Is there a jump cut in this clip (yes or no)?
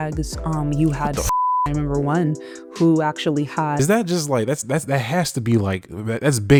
no